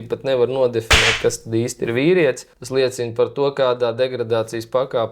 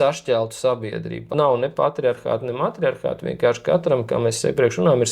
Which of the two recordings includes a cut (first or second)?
second